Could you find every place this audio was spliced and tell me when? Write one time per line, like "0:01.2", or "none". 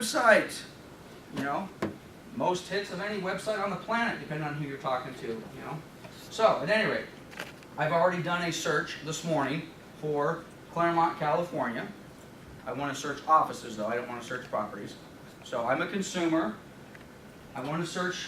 0:03.6